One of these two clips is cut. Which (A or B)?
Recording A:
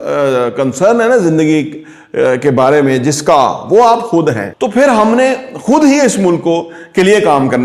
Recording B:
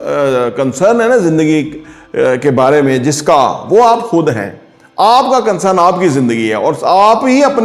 A